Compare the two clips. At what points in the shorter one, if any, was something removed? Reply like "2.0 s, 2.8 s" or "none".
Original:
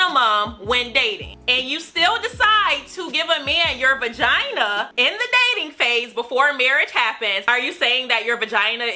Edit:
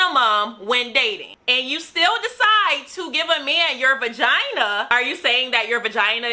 4.9 s